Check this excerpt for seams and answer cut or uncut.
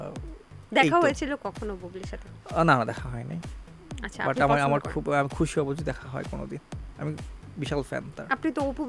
uncut